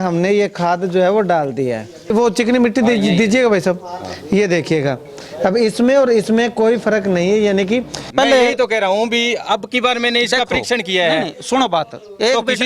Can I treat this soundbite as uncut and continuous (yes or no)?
no